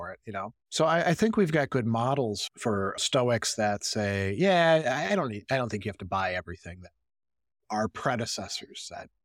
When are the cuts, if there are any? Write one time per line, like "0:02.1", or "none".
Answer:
0:02.5